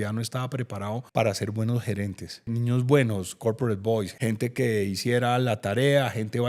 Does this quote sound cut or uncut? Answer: cut